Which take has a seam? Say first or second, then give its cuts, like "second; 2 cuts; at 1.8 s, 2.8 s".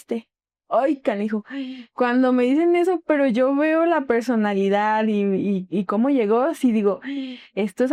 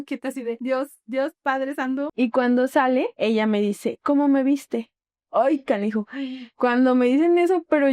second; 1 cut; at 2.1 s